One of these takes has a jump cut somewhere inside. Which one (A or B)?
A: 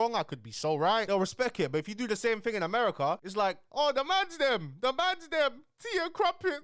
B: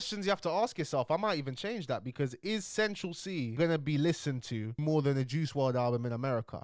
A